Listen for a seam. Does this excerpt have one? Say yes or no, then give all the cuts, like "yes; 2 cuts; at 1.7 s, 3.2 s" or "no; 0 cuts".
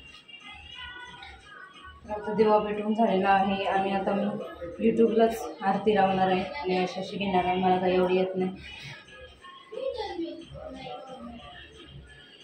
no; 0 cuts